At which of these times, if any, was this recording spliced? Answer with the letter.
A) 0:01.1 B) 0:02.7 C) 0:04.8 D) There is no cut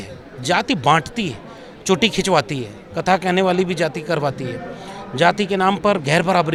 D